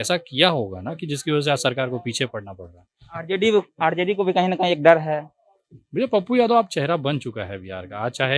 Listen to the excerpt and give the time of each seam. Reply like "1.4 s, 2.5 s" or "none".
none

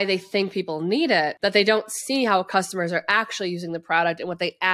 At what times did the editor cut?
1.3 s

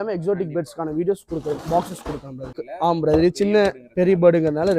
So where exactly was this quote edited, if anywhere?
2.6 s

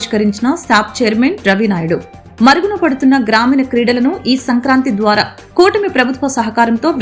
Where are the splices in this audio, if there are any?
none

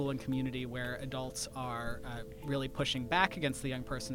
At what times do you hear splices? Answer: none

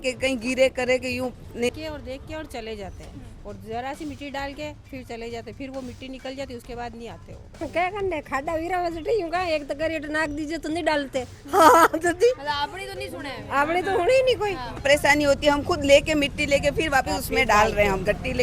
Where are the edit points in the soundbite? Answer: 1.7 s, 7.6 s, 14.8 s

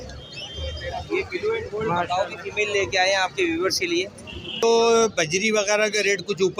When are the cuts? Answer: 4.6 s

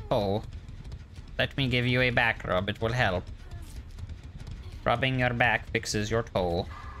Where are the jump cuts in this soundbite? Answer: none

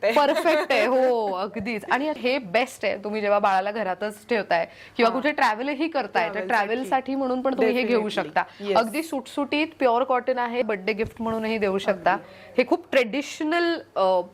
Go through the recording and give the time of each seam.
2.2 s, 10.6 s

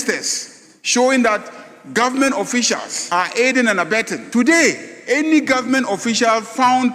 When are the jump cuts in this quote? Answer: 2.9 s, 4.2 s

